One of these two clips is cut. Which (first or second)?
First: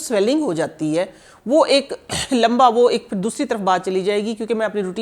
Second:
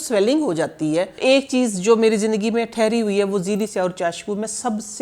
second